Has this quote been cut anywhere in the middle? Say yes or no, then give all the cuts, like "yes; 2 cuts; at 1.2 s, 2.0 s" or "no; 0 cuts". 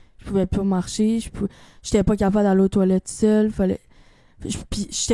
no; 0 cuts